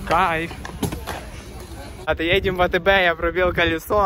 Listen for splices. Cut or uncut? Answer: cut